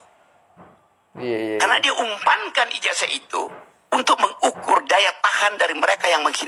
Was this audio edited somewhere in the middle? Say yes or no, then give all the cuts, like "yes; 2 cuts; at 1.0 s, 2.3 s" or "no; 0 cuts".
no; 0 cuts